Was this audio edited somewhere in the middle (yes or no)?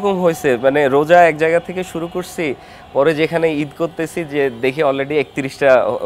no